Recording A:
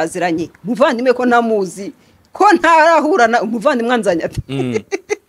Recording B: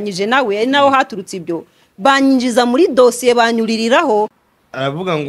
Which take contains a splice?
B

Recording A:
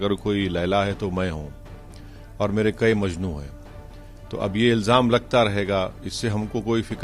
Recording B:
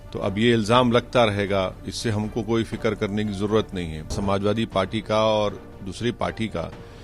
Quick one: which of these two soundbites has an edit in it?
B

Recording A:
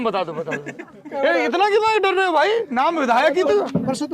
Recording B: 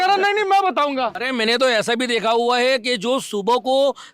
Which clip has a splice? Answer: B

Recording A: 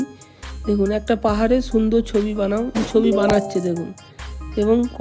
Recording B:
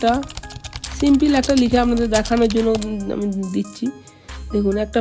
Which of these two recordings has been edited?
A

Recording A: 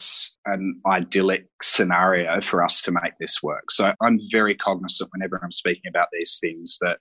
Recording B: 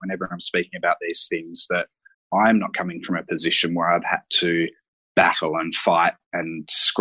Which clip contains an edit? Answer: A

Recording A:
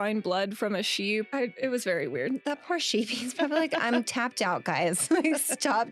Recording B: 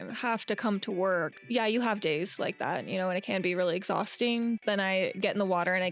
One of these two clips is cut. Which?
B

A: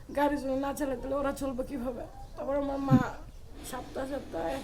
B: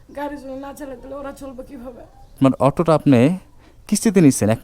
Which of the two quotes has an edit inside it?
B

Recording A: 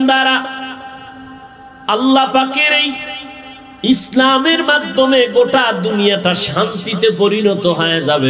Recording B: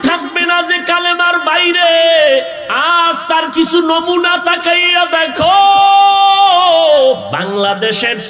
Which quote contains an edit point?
B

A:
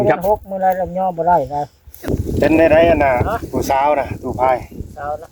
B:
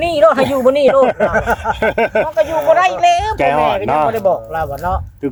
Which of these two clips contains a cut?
A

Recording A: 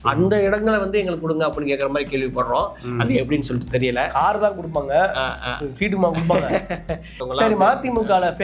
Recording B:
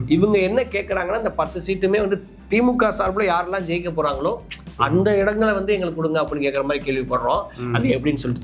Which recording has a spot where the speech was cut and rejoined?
A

